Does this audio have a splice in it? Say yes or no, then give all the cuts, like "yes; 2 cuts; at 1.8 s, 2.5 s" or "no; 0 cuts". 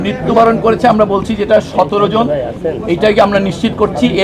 no; 0 cuts